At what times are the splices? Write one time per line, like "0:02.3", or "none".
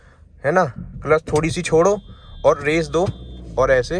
none